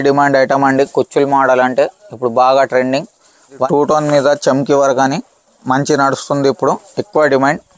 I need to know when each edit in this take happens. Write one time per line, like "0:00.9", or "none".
0:03.7